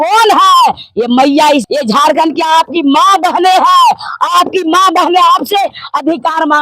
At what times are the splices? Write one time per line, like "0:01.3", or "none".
0:01.7